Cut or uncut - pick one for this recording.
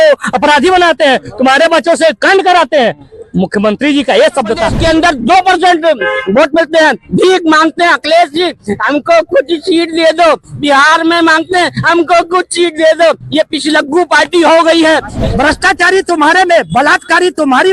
cut